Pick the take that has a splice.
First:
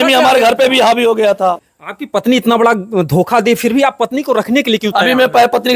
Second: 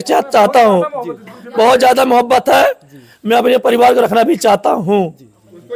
first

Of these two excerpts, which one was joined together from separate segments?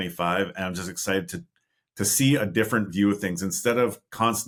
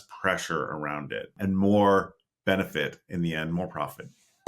second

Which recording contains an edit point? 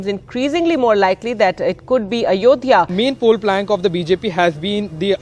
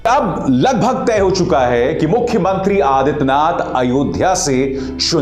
first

